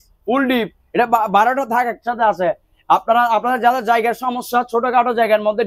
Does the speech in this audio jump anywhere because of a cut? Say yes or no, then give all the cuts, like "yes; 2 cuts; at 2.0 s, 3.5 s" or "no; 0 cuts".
no; 0 cuts